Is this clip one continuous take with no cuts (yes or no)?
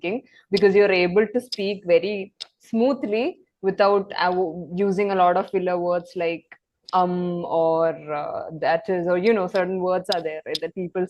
yes